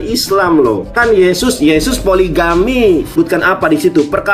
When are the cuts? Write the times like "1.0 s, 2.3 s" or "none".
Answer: 0.9 s, 3.1 s